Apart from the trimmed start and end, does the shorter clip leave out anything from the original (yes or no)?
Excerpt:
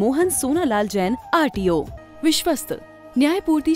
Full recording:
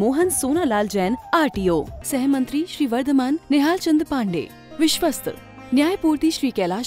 yes